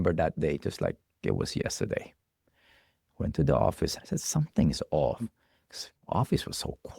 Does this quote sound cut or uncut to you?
cut